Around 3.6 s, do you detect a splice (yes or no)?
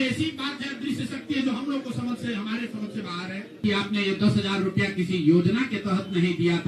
yes